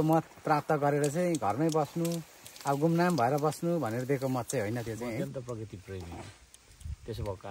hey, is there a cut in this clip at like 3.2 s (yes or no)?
no